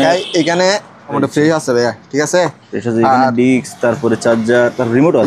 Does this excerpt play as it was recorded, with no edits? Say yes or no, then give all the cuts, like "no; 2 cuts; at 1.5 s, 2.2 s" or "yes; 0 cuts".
no; 1 cut; at 1.1 s